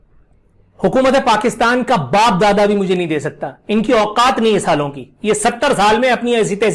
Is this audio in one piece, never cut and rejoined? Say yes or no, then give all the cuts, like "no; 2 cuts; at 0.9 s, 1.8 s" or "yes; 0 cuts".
yes; 0 cuts